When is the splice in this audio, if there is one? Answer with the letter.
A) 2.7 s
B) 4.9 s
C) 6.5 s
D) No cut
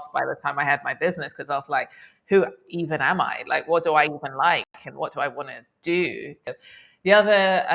C